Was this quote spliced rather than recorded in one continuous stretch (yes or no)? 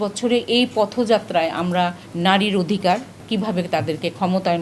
yes